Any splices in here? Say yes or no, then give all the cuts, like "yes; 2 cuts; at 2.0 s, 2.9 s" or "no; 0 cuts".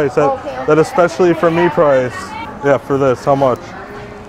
no; 0 cuts